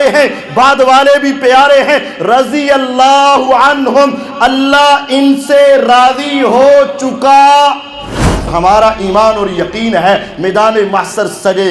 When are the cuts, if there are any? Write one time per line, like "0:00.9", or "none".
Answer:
0:08.5